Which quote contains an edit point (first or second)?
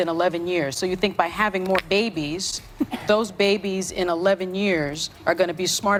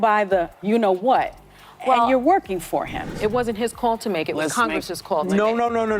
second